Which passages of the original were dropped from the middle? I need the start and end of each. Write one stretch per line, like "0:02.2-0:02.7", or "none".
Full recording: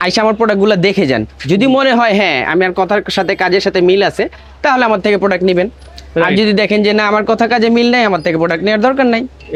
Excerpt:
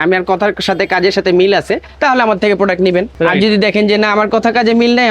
0:04.3-0:04.5
0:05.7-0:06.1